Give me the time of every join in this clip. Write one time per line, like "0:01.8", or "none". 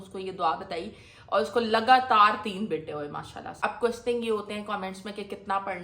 0:03.6

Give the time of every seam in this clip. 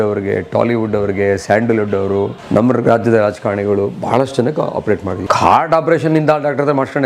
0:02.4
0:05.1

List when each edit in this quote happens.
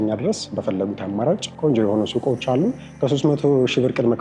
0:01.5
0:02.8

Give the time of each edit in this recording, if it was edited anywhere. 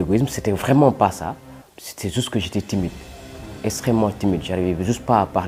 none

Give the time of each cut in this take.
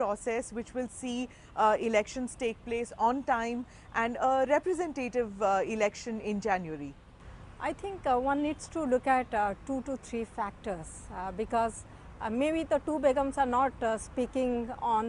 0:11.3

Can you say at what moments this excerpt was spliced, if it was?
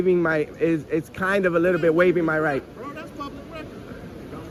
none

